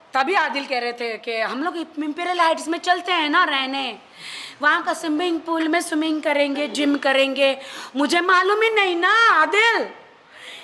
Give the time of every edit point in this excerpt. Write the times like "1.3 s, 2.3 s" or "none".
none